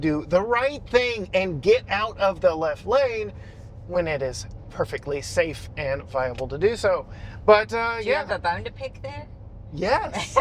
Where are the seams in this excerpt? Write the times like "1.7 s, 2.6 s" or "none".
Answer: none